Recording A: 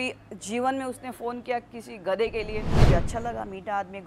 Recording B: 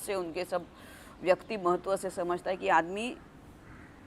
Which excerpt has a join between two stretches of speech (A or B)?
A